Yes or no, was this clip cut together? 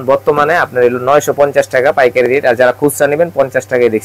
no